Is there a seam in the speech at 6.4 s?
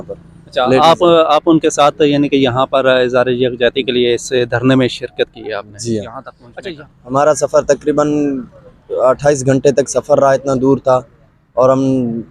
yes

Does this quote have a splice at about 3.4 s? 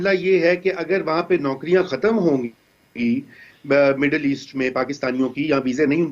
yes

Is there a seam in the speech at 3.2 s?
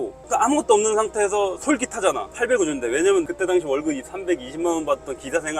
yes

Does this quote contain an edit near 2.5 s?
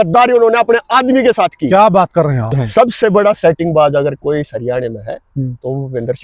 yes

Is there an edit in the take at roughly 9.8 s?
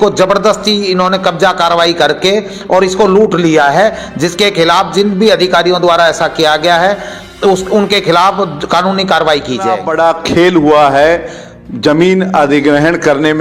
yes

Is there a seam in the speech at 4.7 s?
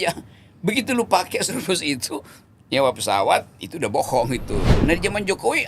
yes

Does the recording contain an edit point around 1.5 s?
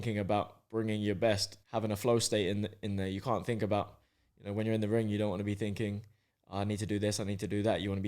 yes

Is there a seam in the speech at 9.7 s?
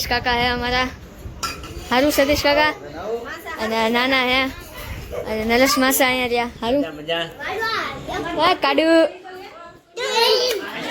no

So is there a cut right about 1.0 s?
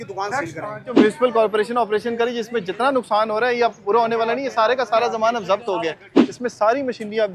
yes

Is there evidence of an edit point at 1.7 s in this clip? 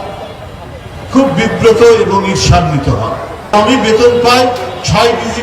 no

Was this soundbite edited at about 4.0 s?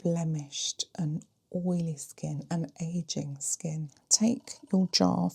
yes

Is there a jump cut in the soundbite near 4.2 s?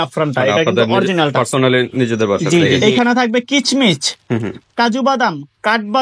no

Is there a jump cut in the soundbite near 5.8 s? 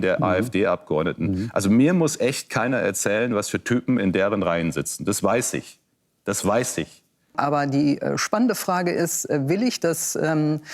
no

